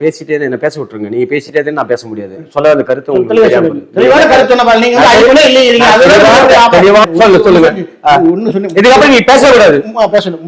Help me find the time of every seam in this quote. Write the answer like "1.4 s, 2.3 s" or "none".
7.0 s

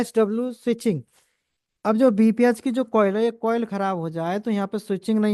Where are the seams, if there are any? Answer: none

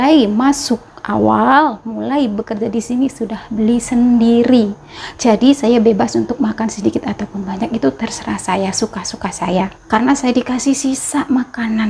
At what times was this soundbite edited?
9.8 s

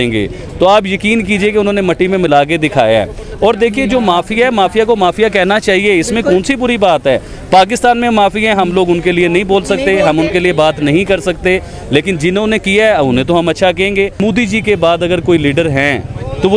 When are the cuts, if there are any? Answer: 14.2 s

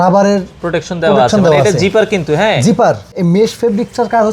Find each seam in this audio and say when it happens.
3.1 s

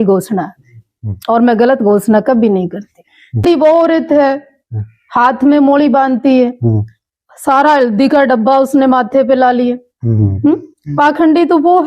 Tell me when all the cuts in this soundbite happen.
3.4 s

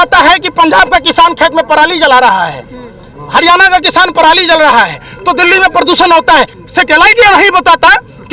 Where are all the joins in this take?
6.6 s

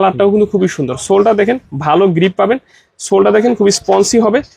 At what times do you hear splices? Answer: none

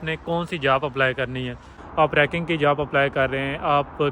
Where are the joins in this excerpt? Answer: 1.8 s

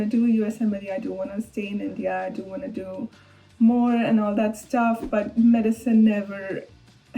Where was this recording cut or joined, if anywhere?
none

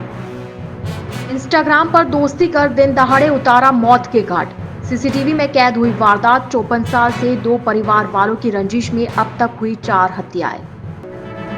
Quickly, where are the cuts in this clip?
1.2 s

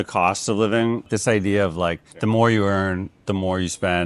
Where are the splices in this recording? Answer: 1.1 s

